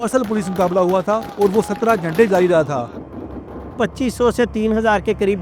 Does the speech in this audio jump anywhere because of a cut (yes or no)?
yes